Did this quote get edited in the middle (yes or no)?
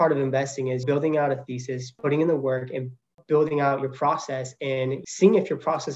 yes